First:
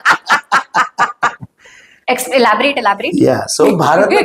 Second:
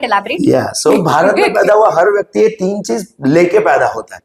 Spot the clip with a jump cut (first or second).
first